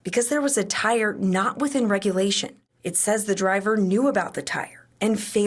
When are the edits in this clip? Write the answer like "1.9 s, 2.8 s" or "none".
2.6 s

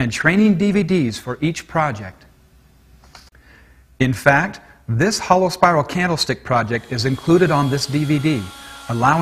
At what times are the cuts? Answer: 4.2 s

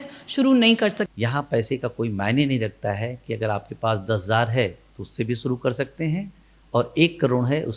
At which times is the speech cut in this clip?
1.0 s

